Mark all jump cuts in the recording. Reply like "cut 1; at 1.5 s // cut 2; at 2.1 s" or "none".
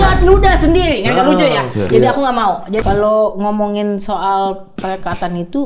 cut 1; at 2.8 s